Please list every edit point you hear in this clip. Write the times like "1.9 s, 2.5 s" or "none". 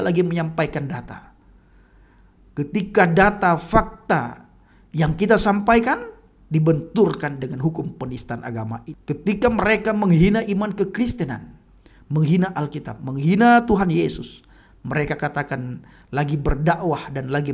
8.8 s